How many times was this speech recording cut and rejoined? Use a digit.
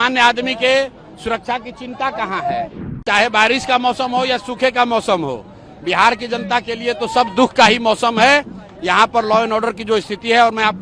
1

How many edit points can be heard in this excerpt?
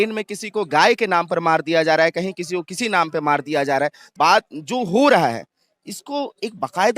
1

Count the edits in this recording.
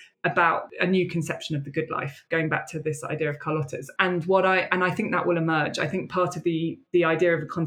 0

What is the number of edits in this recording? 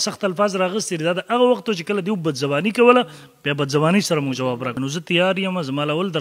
1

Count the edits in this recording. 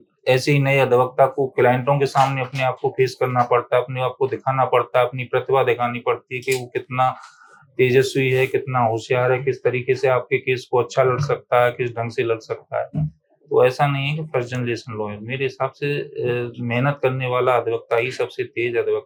0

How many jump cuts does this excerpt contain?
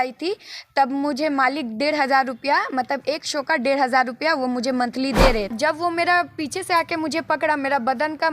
1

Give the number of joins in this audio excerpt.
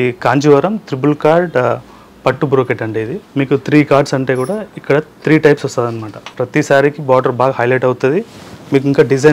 2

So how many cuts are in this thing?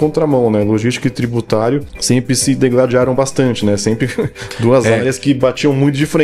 1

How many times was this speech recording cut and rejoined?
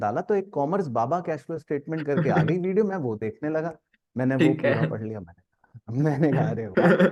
0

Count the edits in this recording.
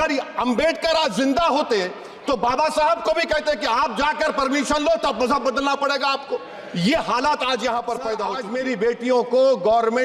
1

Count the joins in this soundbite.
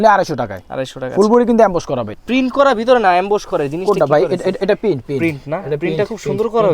1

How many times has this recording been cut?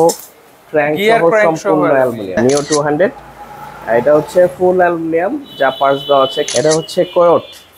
2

